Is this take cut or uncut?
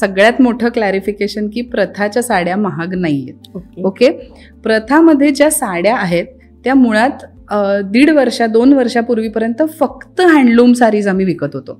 uncut